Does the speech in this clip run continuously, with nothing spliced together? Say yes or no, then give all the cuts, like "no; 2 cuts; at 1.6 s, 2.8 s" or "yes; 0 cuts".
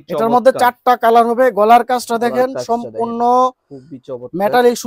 yes; 0 cuts